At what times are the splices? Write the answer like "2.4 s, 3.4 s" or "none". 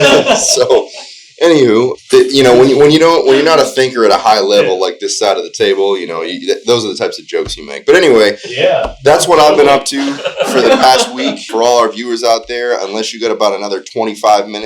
2.0 s, 11.4 s

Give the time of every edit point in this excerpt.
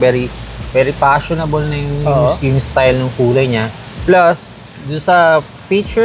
none

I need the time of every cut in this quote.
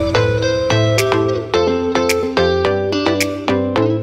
none

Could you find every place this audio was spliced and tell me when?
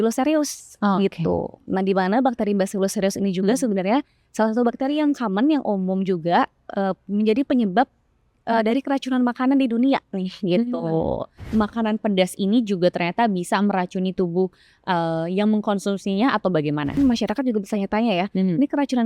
11.5 s, 17.0 s

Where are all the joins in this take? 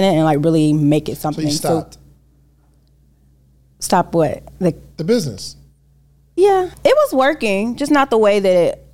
6.7 s

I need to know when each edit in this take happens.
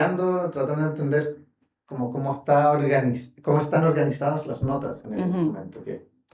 none

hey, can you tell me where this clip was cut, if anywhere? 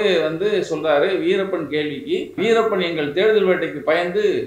2.4 s

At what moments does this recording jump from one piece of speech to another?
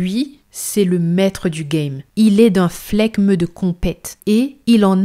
2.0 s

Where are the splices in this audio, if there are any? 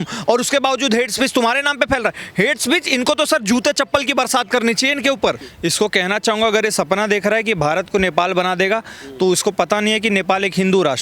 5.5 s

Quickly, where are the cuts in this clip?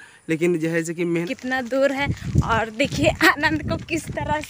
1.2 s

